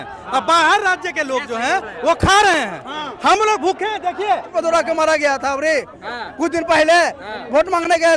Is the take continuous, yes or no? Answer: no